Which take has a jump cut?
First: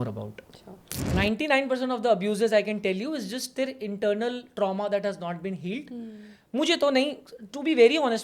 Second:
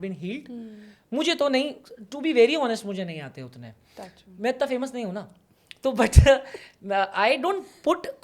first; 1 cut; at 1.0 s

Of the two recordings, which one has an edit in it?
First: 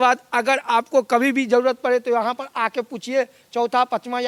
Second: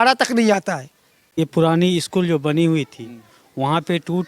second; 1 cut; at 1.3 s

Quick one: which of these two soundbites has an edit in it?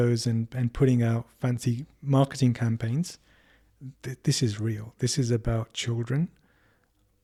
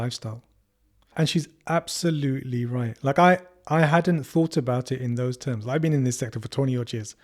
second; 1 cut; at 1.1 s

